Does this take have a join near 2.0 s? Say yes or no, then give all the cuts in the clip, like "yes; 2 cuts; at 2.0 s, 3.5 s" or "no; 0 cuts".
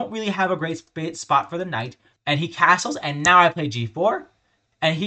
yes; 1 cut; at 2.0 s